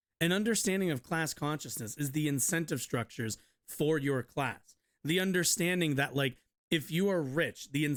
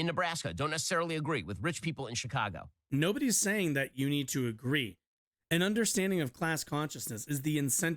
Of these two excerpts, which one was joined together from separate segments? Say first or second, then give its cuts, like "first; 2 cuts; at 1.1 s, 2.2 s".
second; 1 cut; at 2.9 s